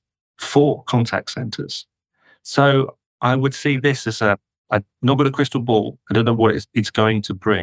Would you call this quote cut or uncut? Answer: uncut